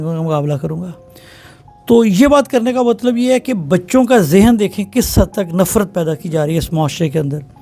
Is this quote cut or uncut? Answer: uncut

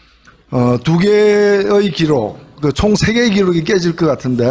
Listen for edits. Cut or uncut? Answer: cut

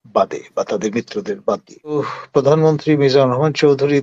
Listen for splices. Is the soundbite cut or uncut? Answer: cut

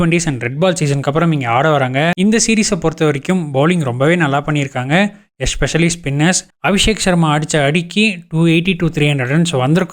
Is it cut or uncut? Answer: cut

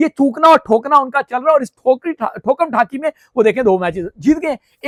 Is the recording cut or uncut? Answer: uncut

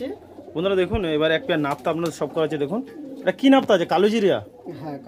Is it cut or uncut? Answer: uncut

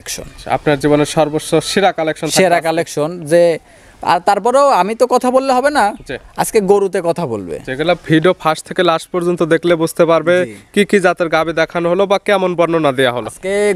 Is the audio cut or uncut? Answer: uncut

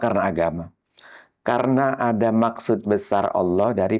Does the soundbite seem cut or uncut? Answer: uncut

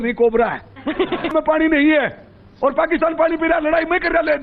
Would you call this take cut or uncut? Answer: cut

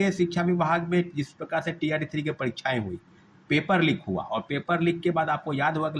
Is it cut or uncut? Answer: uncut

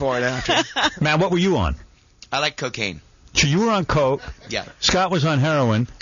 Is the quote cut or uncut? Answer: cut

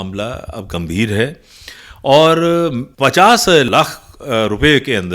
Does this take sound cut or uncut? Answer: cut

